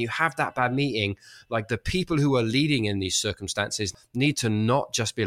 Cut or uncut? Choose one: cut